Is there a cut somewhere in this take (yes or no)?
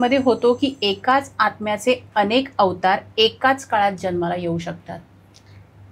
no